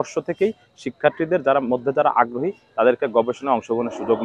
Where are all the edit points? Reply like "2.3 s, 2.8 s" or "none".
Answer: none